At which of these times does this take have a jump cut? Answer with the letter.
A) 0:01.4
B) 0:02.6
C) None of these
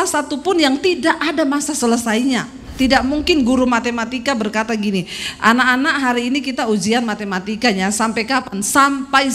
B